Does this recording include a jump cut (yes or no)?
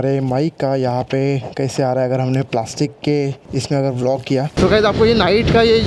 yes